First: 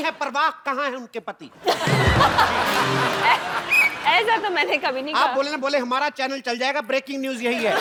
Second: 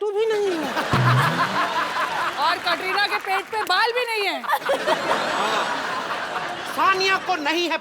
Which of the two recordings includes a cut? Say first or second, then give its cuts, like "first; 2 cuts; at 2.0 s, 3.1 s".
second; 1 cut; at 6.6 s